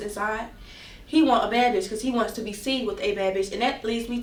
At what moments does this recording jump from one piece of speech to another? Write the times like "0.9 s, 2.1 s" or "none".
none